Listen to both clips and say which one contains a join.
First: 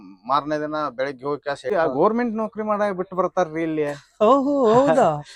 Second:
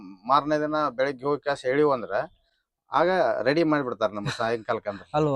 first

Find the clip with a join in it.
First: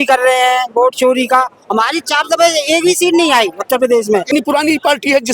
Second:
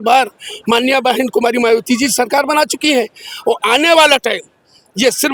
first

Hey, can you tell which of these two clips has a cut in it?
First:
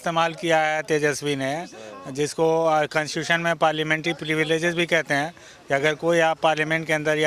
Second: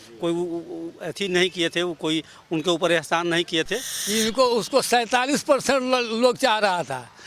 second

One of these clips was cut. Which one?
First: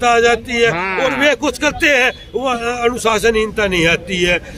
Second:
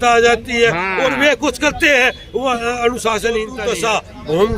second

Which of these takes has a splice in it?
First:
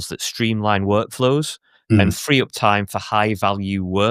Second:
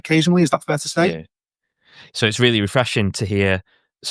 second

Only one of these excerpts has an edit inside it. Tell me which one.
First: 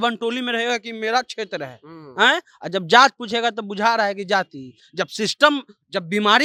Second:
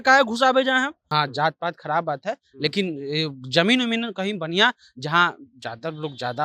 second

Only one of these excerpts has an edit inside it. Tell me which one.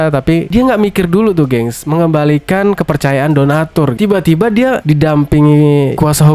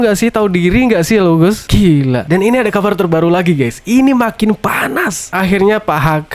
first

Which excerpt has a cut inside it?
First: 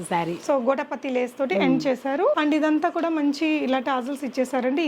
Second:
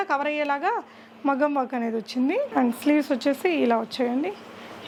first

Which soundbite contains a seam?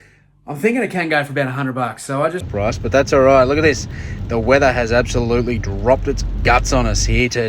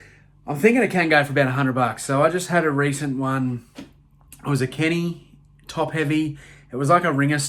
first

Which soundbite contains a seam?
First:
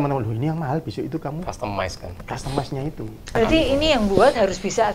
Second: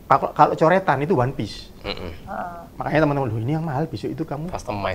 first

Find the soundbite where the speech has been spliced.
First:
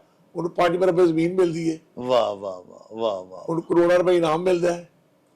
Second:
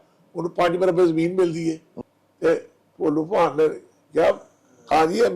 second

